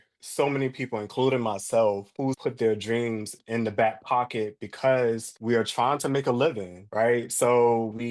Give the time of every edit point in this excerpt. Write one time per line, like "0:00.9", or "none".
0:02.2
0:03.3
0:05.3